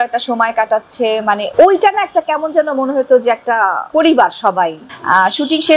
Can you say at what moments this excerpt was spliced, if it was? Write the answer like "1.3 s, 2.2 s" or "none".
1.5 s, 3.8 s, 4.9 s

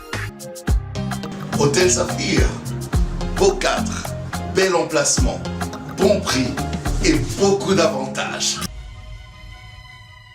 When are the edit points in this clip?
8.7 s

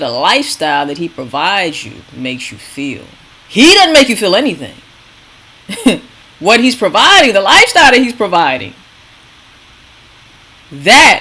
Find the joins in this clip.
none

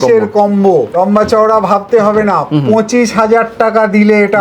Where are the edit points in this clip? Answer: 0.9 s

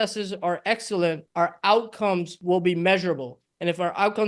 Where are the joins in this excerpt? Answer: 1.2 s, 2.3 s

